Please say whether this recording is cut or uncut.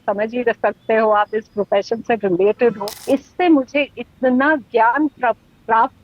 cut